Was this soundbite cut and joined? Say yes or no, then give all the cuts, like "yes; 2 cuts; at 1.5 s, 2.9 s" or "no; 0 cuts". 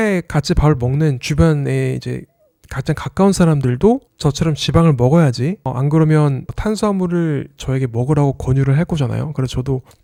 no; 0 cuts